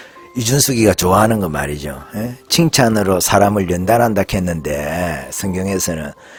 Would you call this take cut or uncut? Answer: uncut